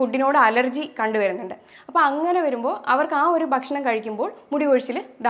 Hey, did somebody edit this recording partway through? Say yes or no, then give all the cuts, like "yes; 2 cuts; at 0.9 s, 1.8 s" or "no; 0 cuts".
no; 0 cuts